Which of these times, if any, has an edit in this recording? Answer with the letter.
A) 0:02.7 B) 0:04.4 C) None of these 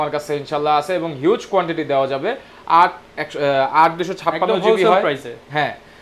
C